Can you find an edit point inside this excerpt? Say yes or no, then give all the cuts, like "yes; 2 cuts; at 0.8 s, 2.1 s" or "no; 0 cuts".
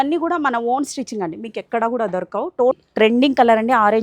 yes; 1 cut; at 2.8 s